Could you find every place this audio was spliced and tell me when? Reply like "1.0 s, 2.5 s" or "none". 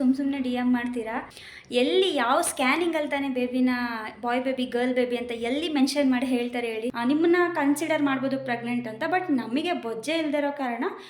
1.2 s, 7.0 s